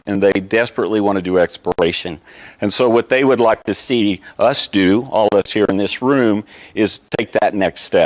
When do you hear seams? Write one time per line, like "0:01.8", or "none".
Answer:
0:01.8